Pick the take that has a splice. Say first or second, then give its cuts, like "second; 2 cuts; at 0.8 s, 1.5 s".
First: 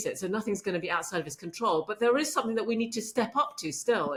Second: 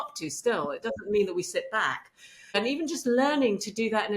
second; 1 cut; at 2.6 s